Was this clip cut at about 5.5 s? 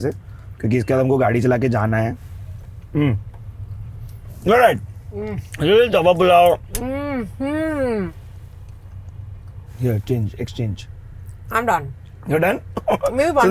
no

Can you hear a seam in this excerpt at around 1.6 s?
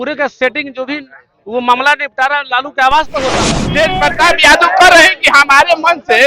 no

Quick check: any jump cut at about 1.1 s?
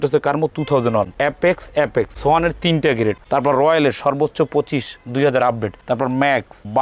yes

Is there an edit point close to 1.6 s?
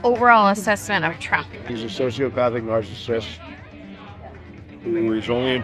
yes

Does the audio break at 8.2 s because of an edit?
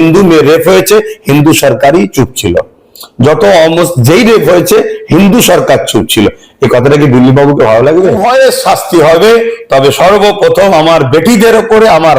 yes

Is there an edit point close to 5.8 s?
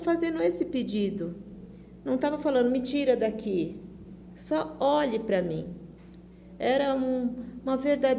no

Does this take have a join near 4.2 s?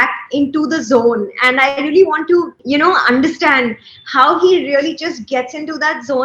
no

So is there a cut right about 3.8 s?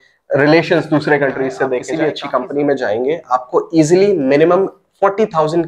no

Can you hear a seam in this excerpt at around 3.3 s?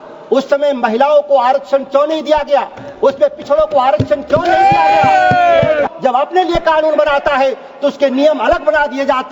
no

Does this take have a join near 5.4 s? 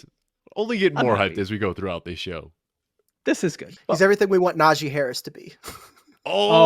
no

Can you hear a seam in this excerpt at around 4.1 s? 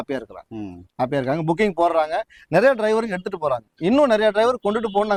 no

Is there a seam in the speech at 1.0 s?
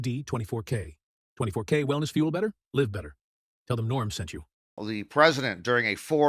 no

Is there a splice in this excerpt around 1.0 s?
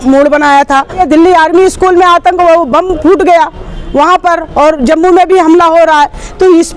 yes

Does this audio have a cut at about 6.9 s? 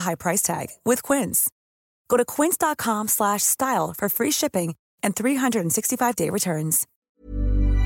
yes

